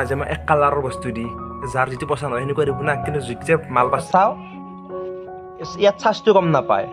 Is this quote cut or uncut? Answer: cut